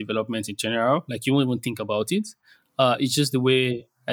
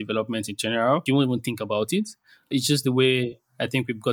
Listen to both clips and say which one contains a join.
second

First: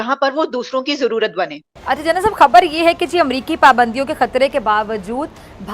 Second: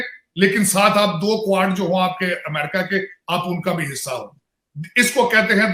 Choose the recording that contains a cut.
first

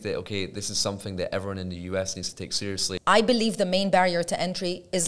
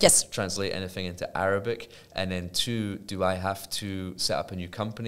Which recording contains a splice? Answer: first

